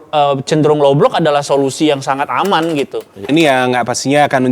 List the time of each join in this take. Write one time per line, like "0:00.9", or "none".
0:03.3